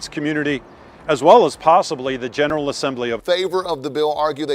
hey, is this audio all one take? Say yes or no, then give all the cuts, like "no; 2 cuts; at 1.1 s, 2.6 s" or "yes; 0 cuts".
no; 1 cut; at 3.2 s